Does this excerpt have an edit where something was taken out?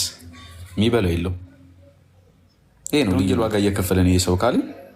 yes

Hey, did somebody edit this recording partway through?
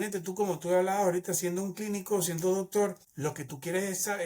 yes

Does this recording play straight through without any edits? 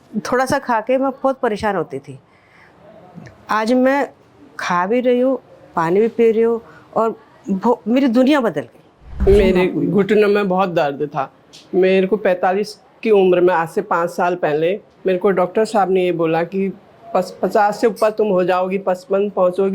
no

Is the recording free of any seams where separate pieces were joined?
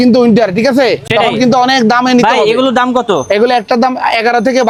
yes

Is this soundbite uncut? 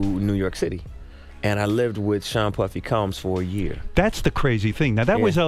yes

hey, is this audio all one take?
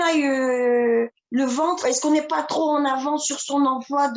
yes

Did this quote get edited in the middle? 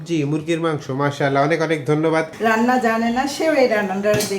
yes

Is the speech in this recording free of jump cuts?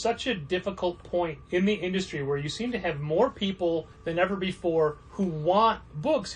no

